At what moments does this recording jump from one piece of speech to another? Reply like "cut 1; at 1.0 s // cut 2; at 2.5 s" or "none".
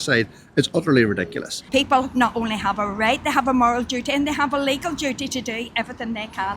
cut 1; at 1.7 s

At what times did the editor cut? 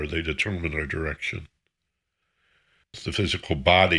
cut 1; at 3.0 s

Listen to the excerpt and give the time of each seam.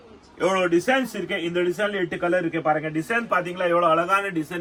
none

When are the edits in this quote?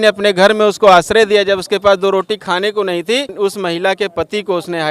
cut 1; at 3.3 s

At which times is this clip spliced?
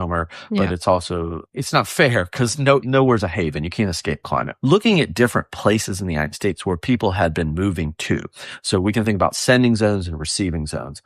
cut 1; at 1.4 s // cut 2; at 2.9 s // cut 3; at 4.5 s

